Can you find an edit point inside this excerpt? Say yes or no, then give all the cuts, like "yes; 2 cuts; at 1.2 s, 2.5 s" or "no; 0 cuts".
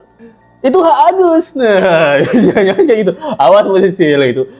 no; 0 cuts